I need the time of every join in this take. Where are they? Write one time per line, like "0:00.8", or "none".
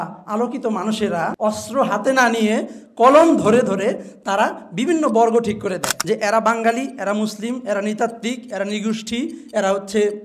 0:01.3
0:05.9